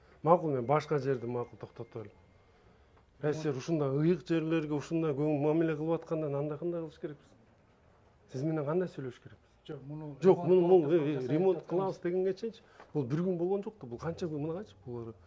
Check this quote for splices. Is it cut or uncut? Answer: uncut